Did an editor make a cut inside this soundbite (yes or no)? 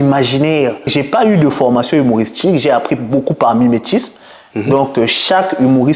yes